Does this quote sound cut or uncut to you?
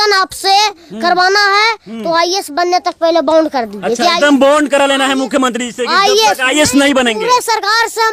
uncut